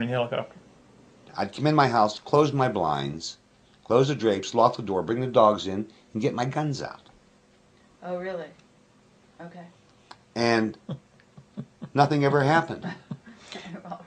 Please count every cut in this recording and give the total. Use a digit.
1